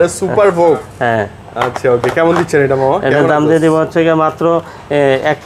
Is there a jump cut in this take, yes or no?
no